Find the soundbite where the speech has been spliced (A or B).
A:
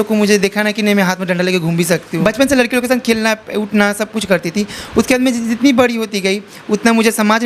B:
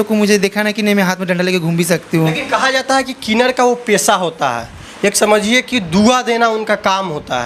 A